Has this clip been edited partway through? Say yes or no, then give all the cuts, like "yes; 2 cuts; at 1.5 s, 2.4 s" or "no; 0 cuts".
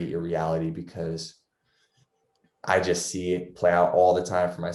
no; 0 cuts